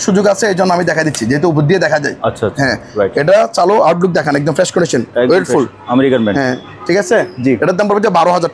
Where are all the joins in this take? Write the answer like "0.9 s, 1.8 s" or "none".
none